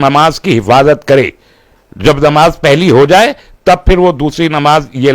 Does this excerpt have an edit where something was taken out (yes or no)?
no